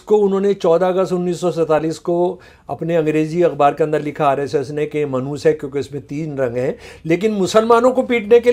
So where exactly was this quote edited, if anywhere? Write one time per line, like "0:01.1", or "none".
none